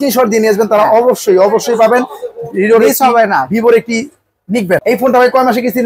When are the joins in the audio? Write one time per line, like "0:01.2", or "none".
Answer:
0:04.8